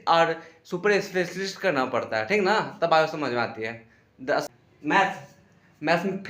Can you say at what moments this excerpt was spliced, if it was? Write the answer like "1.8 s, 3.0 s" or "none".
4.4 s